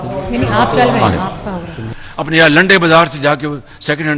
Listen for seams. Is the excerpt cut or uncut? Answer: cut